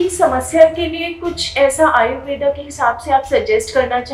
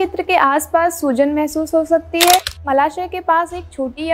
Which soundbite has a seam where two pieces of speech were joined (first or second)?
second